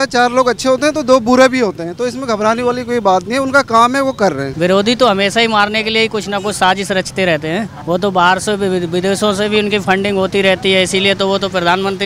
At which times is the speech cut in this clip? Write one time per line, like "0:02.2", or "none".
0:04.5
0:07.7